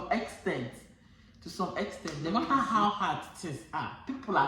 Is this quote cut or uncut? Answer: cut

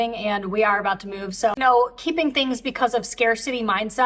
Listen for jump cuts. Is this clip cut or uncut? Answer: cut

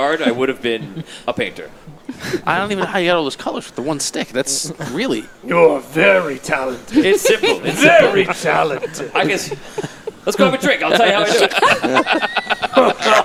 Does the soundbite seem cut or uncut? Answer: uncut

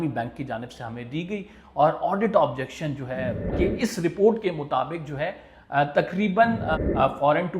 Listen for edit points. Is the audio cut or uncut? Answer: cut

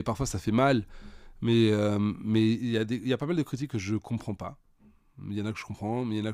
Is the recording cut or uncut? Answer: uncut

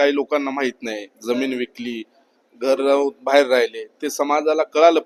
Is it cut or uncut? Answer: uncut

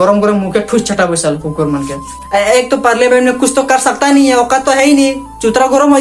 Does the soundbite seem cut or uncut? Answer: cut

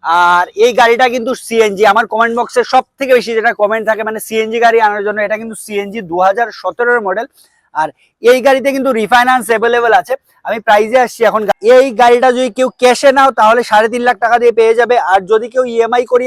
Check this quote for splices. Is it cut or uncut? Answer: uncut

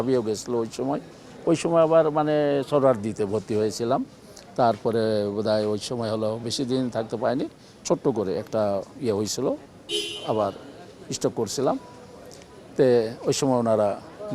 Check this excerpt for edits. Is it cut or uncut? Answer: uncut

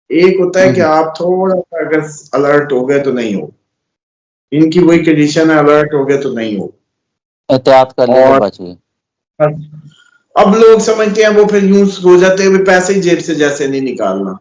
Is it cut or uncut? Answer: uncut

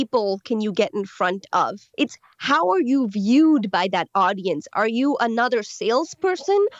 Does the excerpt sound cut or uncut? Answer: cut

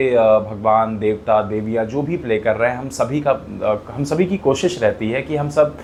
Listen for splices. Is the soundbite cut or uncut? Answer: uncut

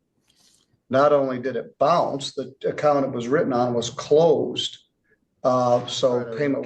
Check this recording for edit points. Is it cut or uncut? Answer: uncut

